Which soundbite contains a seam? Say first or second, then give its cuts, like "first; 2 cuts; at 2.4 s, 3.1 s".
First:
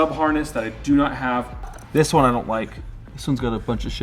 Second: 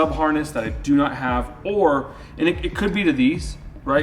first; 1 cut; at 1.5 s